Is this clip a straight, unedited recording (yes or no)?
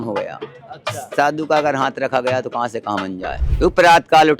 no